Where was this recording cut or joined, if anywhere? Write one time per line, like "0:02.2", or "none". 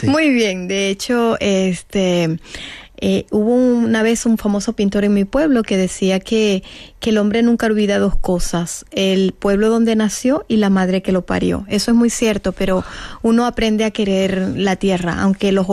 0:05.9